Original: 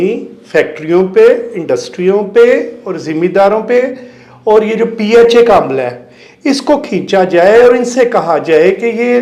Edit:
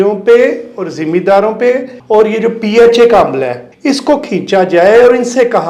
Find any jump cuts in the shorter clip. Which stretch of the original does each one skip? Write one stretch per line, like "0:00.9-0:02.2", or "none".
0:04.0-0:04.3
0:06.0-0:06.3